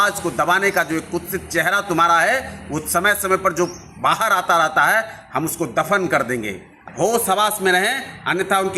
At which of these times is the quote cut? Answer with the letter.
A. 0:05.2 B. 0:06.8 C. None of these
B